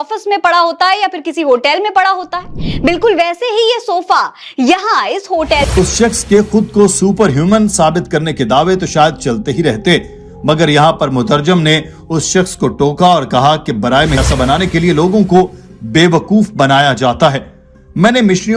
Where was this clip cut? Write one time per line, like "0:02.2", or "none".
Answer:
0:05.7
0:14.2